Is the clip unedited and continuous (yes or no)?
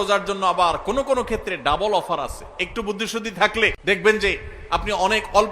no